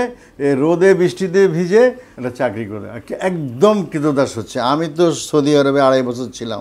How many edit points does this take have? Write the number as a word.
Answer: one